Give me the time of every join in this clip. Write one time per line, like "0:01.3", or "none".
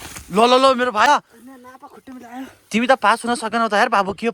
0:01.1

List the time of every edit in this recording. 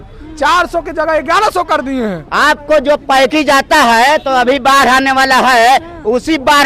0:02.2

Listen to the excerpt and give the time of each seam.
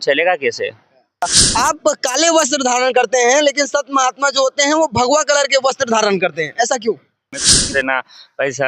0:01.2
0:07.4

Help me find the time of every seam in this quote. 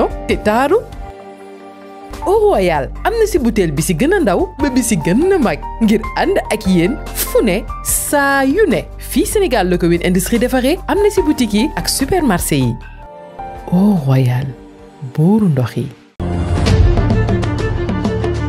none

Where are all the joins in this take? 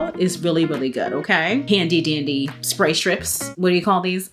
0:01.6

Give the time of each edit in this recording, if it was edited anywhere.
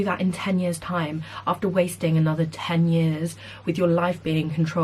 none

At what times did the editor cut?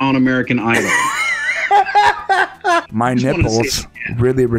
0:02.9

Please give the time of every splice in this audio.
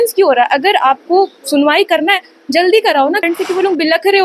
0:03.2

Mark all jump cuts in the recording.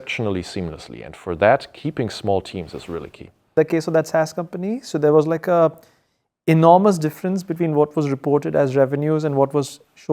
0:03.5

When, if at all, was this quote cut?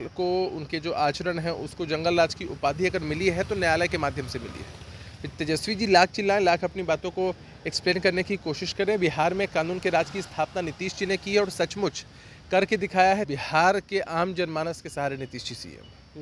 0:13.3

